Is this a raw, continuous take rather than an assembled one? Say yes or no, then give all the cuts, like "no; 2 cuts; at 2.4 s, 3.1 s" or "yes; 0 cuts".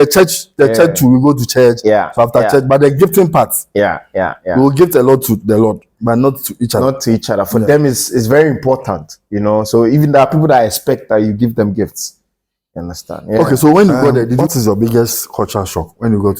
no; 1 cut; at 14.4 s